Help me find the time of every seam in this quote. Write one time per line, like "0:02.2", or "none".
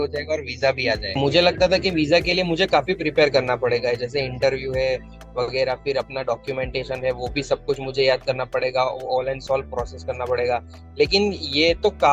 0:01.1